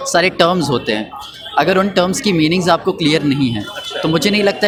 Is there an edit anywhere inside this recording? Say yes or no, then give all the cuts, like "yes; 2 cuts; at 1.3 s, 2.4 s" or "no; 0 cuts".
no; 0 cuts